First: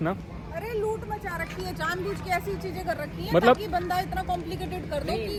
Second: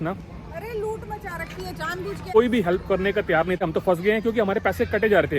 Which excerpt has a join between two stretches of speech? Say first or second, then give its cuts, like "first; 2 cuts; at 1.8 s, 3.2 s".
second; 2 cuts; at 2.3 s, 3.6 s